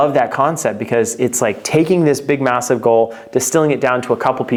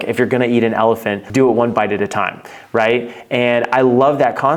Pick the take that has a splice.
second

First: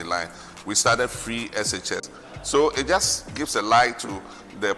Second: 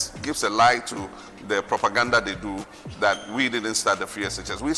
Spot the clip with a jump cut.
first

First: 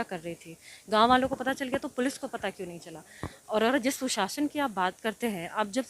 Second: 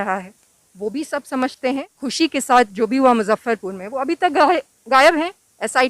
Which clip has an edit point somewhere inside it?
second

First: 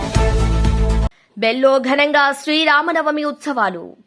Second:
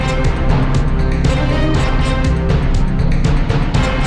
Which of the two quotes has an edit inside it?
first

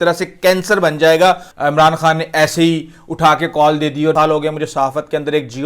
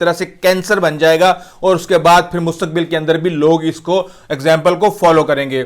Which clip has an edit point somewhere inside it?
first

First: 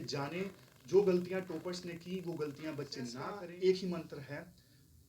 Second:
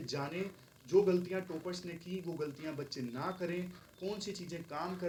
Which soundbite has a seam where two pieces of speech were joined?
first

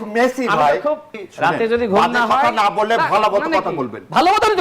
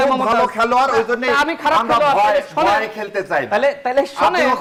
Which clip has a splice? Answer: first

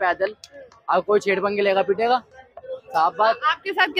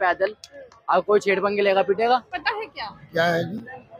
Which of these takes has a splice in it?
second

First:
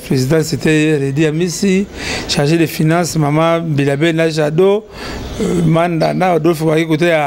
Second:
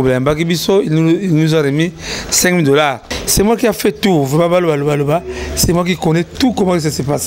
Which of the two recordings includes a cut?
second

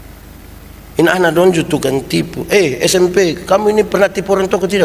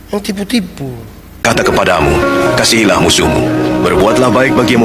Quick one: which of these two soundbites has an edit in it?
second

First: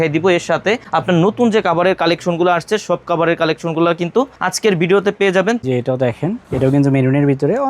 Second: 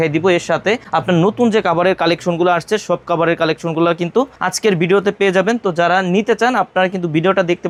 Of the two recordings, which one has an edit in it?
first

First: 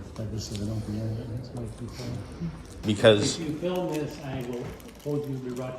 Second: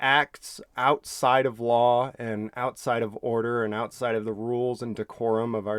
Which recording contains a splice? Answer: first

